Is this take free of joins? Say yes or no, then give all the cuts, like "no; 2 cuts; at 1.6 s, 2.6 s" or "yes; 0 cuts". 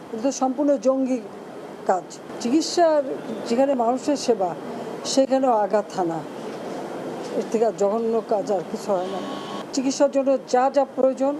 yes; 0 cuts